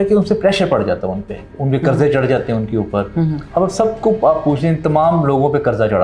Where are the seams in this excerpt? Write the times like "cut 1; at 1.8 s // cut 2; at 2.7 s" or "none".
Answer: none